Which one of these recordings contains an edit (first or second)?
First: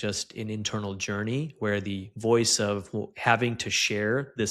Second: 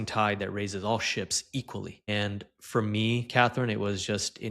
second